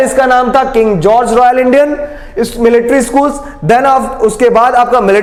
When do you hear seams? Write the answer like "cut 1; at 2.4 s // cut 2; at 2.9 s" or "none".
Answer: none